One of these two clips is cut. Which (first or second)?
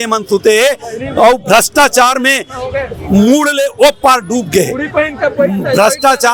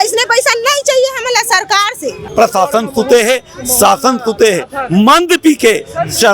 second